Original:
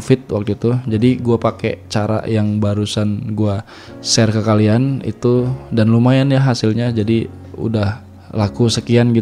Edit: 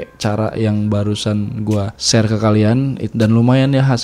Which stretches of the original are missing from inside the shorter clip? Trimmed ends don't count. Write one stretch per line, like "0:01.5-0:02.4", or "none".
0:03.7-0:04.0
0:05.1-0:05.6